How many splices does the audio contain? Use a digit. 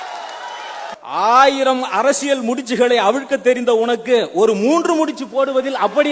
1